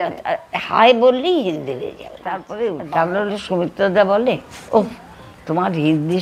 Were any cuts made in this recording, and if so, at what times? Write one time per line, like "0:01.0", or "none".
0:02.4

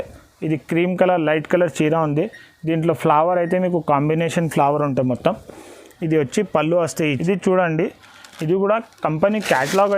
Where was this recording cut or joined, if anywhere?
0:07.2

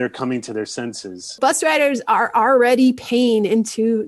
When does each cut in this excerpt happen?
0:01.4

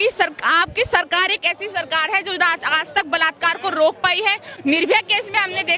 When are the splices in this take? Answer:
none

